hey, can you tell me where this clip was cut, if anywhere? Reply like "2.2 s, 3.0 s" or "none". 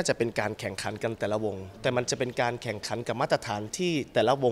none